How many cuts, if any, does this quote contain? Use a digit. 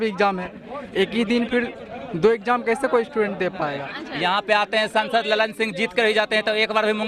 1